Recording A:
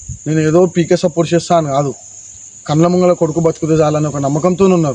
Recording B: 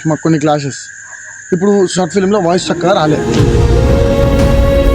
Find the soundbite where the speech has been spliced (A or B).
B